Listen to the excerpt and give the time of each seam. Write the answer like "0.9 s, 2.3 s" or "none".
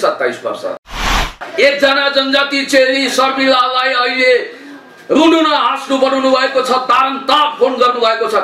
1.3 s